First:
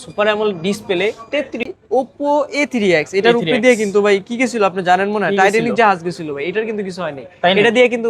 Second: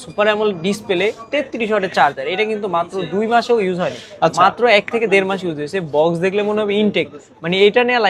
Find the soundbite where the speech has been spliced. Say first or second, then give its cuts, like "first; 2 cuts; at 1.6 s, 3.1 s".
first; 1 cut; at 1.6 s